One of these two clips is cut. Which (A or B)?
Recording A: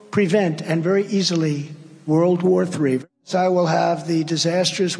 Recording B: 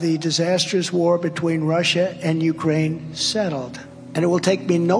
A